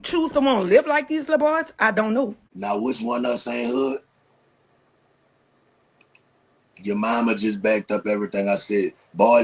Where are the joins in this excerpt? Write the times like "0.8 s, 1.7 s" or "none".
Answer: 2.5 s